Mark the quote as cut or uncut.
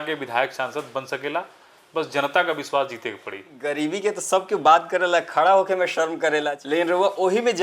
cut